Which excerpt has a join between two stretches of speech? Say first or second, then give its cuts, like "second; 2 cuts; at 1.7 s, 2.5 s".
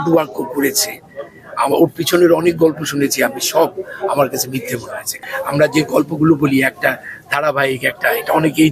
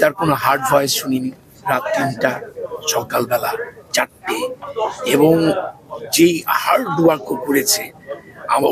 first; 1 cut; at 5.2 s